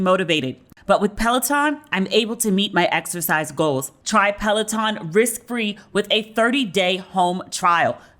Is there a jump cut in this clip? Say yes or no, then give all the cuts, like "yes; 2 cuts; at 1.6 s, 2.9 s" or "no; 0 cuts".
yes; 1 cut; at 3.9 s